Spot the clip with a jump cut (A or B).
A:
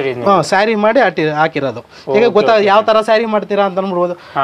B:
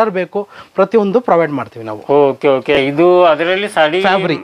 B